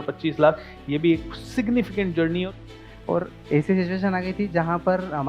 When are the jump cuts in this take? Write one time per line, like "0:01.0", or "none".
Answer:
0:02.6